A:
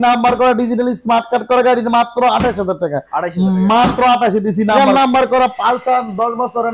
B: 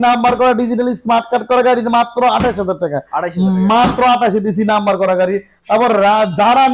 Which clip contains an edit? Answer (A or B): A